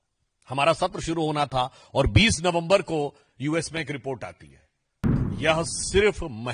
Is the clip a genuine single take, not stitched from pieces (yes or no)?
no